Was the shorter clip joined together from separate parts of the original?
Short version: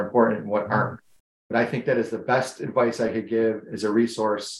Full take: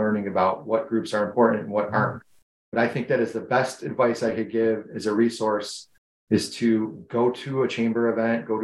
no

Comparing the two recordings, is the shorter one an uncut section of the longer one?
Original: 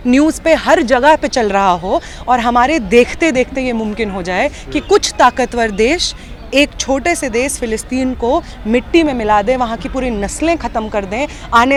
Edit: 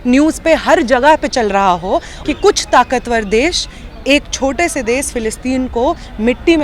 no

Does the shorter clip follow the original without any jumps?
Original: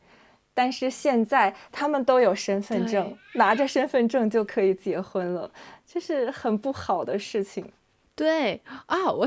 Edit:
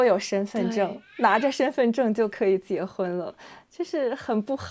yes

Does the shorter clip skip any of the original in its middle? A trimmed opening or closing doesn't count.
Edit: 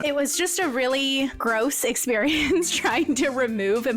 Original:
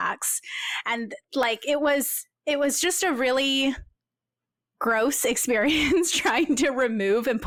yes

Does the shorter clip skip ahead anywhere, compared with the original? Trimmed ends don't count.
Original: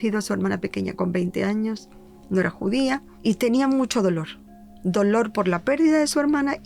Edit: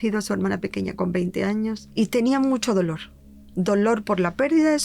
yes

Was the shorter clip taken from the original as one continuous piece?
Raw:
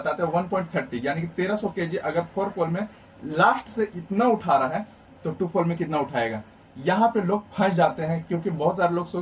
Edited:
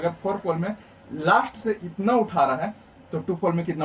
yes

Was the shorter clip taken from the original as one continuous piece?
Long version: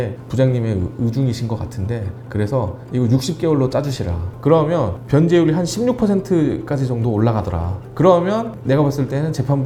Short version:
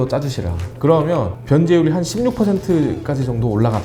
yes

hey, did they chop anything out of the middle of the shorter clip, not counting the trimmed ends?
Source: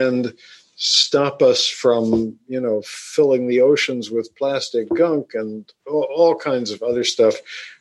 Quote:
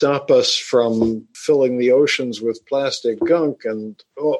yes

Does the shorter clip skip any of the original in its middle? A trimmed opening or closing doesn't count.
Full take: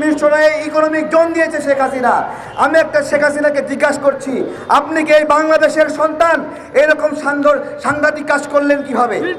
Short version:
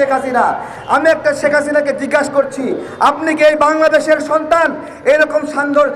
no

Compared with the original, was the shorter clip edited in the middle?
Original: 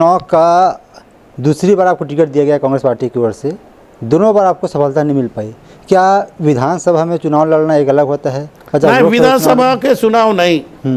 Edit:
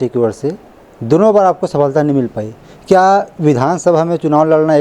no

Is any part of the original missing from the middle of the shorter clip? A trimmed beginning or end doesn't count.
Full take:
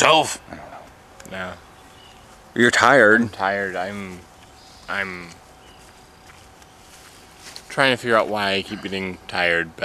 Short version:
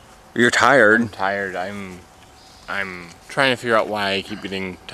yes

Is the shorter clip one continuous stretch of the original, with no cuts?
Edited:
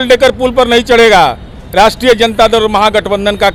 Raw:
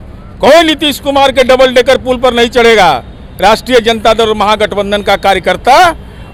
yes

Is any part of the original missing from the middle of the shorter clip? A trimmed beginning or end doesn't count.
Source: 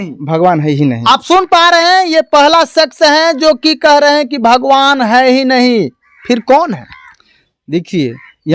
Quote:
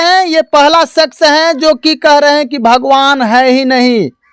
no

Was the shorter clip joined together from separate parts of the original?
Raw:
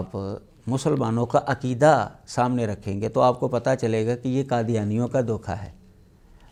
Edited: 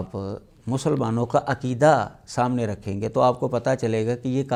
no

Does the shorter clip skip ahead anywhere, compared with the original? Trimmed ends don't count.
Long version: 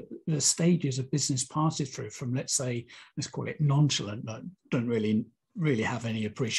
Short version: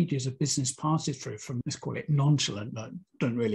yes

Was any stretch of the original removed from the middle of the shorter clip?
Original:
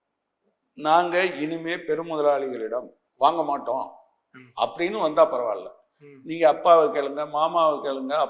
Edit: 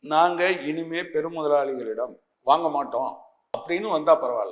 yes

